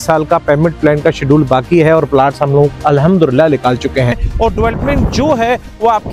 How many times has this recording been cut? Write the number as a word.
one